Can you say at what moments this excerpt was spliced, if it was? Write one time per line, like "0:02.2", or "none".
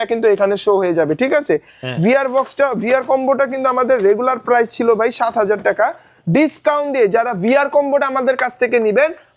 none